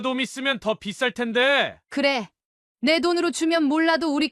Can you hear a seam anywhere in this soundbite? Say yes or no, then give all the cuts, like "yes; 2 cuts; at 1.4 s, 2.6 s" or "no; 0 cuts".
no; 0 cuts